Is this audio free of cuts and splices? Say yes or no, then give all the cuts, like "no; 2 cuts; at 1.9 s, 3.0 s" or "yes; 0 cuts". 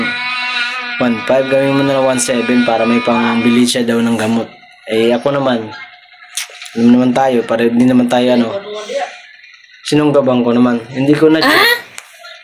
yes; 0 cuts